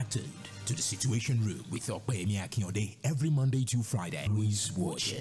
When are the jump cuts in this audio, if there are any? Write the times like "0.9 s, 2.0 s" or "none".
4.3 s